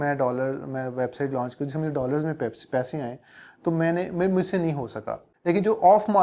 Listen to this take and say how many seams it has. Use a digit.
1